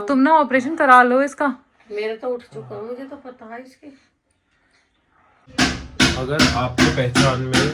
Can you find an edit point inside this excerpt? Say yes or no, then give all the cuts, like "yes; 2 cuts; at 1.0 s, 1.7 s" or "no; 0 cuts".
yes; 1 cut; at 5.5 s